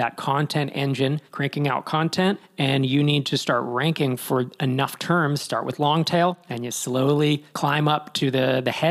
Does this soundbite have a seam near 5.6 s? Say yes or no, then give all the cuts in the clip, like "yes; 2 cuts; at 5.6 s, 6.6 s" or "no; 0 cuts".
no; 3 cuts; at 1.3 s, 2.5 s, 7.5 s